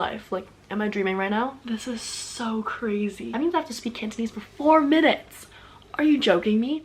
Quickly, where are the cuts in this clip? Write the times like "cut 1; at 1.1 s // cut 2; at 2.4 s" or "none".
cut 1; at 1.6 s // cut 2; at 3.3 s